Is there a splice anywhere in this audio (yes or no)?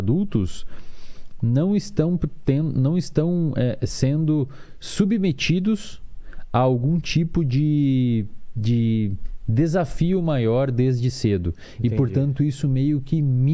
no